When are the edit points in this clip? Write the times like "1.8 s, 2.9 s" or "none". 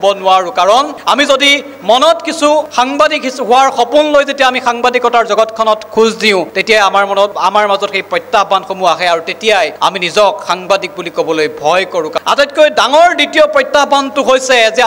12.2 s